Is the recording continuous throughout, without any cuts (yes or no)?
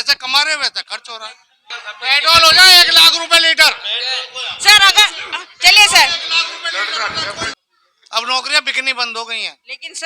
no